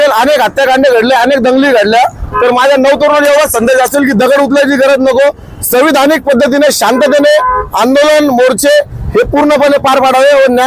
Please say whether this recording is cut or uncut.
uncut